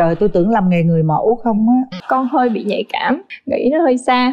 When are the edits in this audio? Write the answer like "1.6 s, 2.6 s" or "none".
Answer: 1.9 s, 3.3 s